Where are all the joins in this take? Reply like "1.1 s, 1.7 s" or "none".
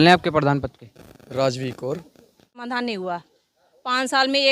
2.6 s

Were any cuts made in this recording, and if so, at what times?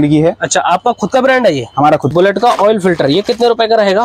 2.1 s

